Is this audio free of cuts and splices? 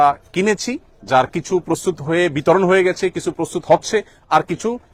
yes; 0 cuts

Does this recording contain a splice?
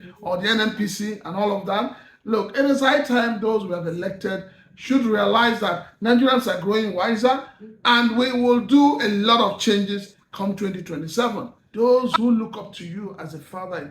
yes; 1 cut; at 11.6 s

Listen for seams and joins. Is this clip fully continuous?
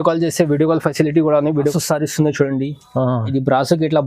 no; 1 cut; at 1.7 s

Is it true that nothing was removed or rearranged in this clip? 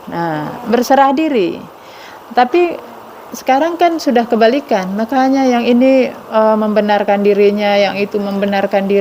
yes; 0 cuts

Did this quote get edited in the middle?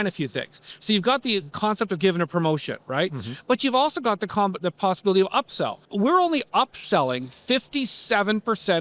yes; 1 cut; at 5.8 s

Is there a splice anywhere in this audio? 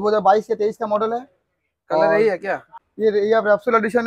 yes; 1 cut; at 2.7 s

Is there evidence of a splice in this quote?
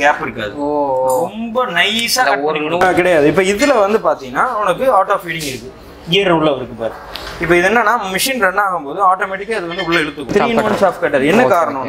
yes; 2 cuts; at 2.8 s, 10.3 s

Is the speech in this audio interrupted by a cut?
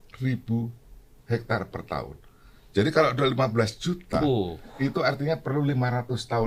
no; 0 cuts

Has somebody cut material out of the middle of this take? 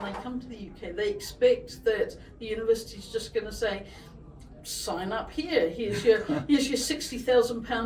no; 0 cuts

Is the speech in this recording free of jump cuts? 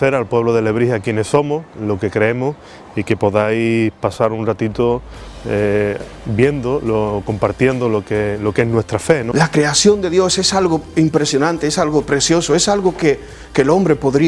no; 1 cut; at 9.3 s

